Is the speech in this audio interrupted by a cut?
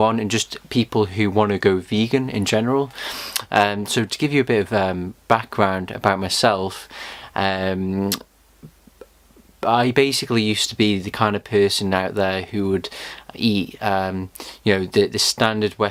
no; 0 cuts

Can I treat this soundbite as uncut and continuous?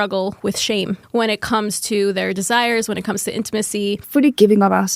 no; 2 cuts; at 1.0 s, 4.0 s

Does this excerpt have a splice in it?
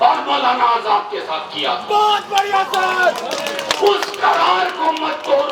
no; 0 cuts

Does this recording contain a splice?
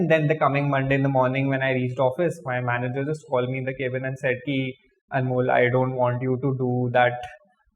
no; 0 cuts

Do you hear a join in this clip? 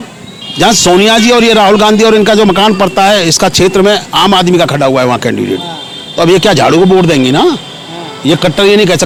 no; 0 cuts

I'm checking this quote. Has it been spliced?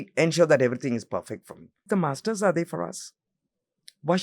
yes; 1 cut; at 1.9 s

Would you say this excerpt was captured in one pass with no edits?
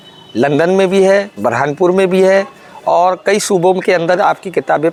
yes; 0 cuts

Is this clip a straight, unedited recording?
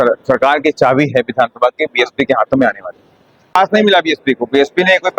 no; 1 cut; at 3.5 s

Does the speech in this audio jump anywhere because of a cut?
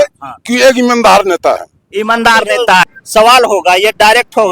yes; 1 cut; at 3.0 s

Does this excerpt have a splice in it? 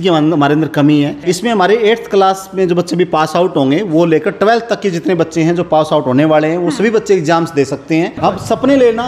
yes; 2 cuts; at 1.2 s, 8.2 s

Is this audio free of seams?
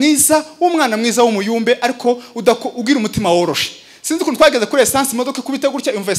yes; 0 cuts

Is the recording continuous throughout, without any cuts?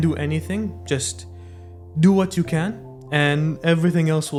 yes; 0 cuts

